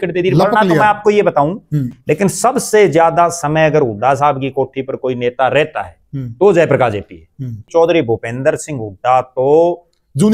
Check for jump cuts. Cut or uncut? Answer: cut